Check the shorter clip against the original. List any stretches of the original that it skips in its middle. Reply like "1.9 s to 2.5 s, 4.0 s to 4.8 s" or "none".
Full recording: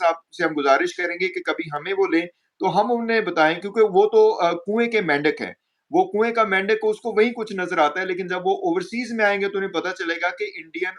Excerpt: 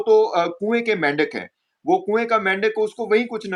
none

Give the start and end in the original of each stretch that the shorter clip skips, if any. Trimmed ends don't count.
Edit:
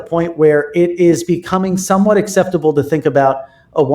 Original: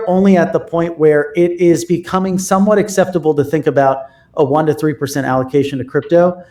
none

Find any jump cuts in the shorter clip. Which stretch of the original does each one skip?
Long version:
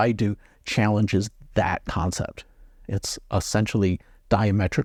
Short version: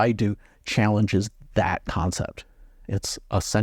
none

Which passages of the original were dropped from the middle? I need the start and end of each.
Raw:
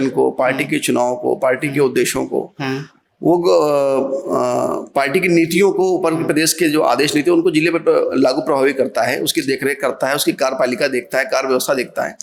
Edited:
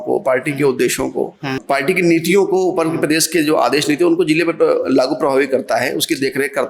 2.8 s to 4.9 s

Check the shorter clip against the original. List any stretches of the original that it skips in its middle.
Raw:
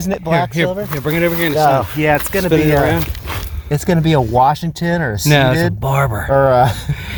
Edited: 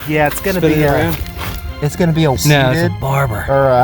4.3 s to 5.2 s

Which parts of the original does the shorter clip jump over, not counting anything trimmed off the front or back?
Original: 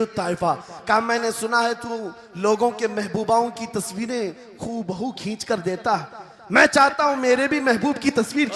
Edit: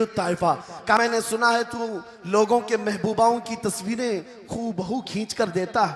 1.0 s to 1.1 s

